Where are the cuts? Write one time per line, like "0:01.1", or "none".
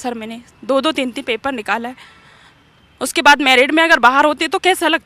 none